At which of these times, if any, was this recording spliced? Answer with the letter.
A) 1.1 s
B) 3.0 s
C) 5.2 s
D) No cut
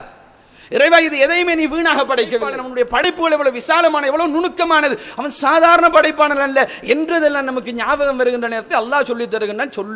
B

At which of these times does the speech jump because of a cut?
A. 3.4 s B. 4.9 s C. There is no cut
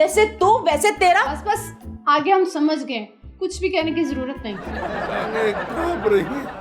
B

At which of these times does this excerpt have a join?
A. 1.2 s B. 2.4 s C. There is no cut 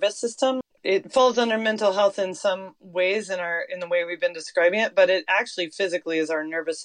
A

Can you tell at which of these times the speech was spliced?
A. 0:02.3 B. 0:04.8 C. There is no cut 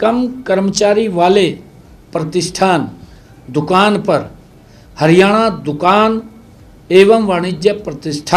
C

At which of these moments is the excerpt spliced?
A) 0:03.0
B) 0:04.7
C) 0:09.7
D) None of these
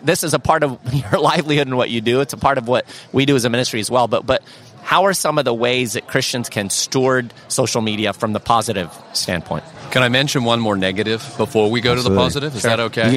C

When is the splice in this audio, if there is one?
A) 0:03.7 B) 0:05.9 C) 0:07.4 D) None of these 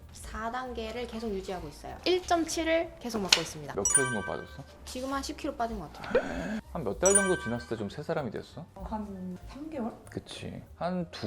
A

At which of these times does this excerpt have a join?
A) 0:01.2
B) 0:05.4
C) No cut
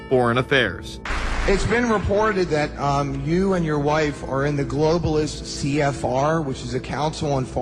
B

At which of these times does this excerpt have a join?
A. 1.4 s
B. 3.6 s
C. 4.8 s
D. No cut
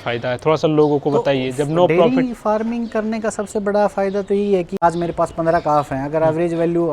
C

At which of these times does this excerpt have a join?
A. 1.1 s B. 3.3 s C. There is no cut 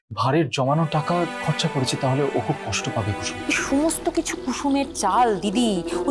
B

